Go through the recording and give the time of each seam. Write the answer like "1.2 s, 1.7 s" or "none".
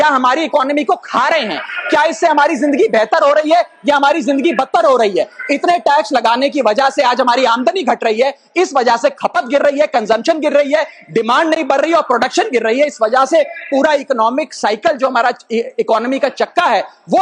none